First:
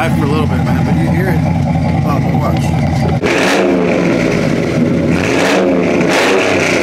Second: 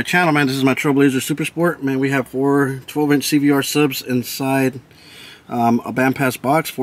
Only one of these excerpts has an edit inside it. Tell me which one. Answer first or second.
first